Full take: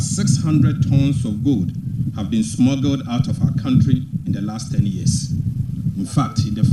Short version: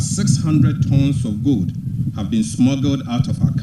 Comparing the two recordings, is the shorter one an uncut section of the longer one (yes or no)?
yes